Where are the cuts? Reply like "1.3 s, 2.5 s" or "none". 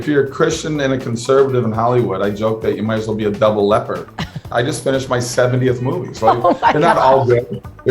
4.5 s